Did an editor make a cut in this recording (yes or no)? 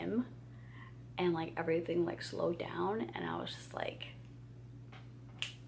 no